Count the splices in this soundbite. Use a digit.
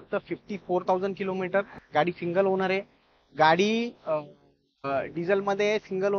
0